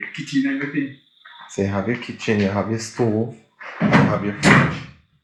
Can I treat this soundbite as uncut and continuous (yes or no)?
yes